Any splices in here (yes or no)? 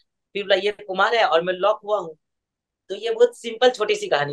no